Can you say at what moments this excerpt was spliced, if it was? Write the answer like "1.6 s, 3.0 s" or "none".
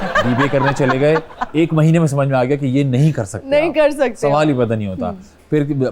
none